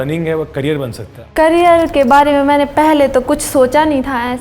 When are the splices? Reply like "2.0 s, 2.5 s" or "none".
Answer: 1.2 s